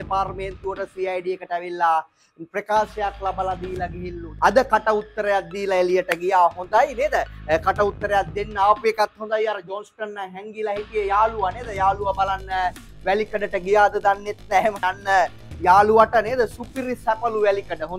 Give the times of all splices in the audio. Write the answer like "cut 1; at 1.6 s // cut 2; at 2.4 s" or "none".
cut 1; at 4.4 s // cut 2; at 14.8 s